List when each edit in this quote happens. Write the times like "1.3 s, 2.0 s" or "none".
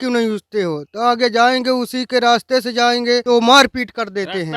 3.2 s